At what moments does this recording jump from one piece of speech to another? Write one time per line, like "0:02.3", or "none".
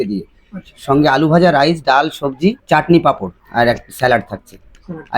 0:02.6
0:03.3